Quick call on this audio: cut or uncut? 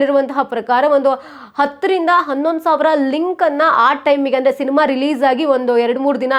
uncut